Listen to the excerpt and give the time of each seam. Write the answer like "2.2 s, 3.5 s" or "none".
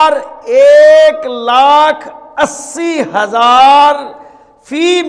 none